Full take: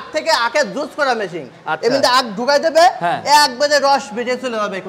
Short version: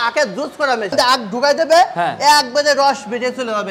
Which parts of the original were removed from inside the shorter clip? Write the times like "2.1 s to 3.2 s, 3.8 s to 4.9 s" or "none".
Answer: 1.3 s to 2.0 s